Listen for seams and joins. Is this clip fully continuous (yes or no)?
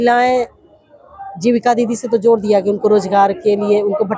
yes